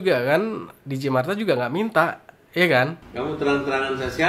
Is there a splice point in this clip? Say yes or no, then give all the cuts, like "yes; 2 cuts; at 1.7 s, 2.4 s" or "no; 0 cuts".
yes; 1 cut; at 3.0 s